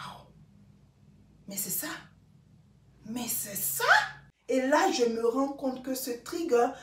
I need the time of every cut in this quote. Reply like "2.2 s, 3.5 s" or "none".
4.3 s